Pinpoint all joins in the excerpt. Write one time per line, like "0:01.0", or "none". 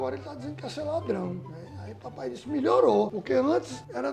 none